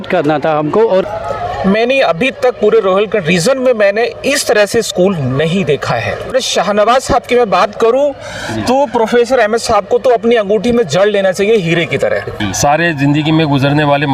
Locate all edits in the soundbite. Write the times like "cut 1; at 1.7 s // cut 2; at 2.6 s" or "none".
cut 1; at 1.1 s // cut 2; at 6.3 s // cut 3; at 12.3 s

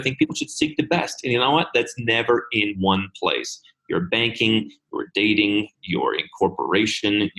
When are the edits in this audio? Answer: none

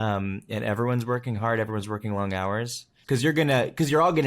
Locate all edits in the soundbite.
cut 1; at 2.9 s

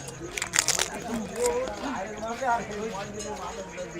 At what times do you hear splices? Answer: none

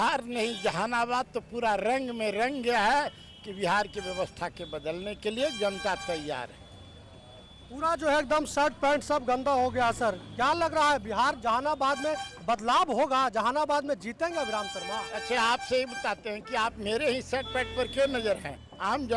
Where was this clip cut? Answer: none

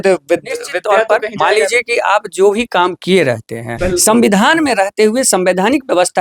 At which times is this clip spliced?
cut 1; at 3.7 s

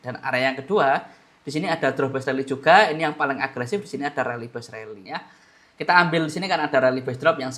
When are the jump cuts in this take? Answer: cut 1; at 5.0 s

